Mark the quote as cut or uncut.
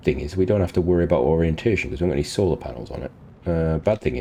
uncut